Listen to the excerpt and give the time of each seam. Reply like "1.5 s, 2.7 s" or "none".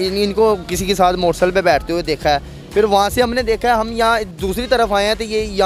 none